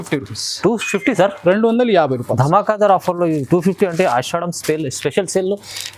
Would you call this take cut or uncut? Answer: uncut